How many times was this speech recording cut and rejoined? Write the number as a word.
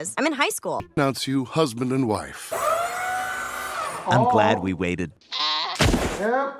two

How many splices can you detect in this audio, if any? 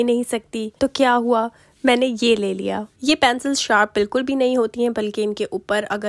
zero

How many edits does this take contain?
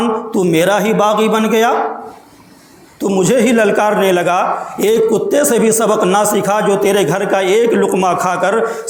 zero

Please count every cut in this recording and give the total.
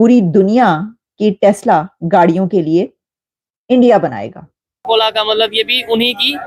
one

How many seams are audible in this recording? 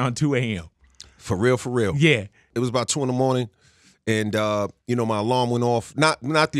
one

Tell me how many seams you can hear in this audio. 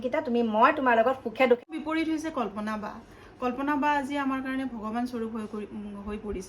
one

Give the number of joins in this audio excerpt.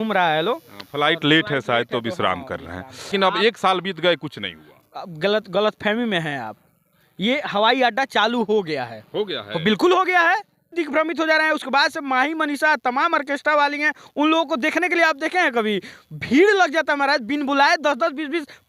two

